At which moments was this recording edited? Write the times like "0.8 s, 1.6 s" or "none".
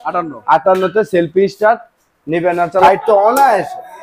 2.8 s